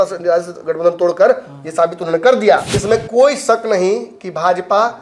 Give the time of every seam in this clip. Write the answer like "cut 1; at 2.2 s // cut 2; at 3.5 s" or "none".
cut 1; at 2.7 s